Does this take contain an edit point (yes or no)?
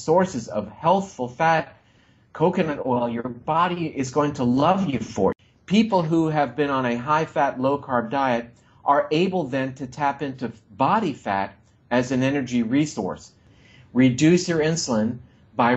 yes